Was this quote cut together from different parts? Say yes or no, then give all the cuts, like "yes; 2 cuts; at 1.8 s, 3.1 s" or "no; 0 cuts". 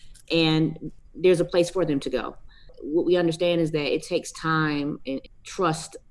yes; 3 cuts; at 0.8 s, 2.7 s, 5.1 s